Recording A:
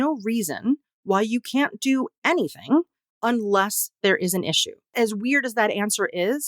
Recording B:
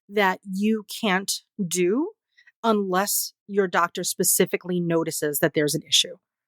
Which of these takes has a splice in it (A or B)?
A